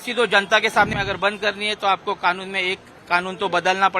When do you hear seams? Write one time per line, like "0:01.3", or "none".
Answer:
0:00.9